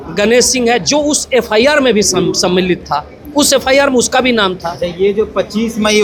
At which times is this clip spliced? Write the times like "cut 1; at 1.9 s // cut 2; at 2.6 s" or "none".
none